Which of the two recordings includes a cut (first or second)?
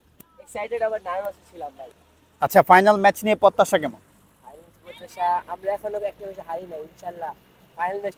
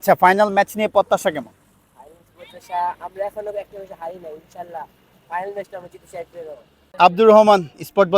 second